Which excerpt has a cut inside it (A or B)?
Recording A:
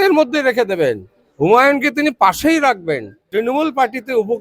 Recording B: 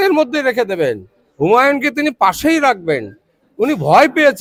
A